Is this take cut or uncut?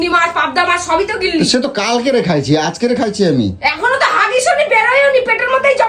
uncut